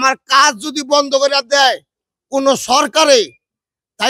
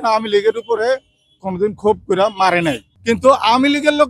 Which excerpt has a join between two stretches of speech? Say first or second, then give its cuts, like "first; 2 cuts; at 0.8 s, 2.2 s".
second; 1 cut; at 2.9 s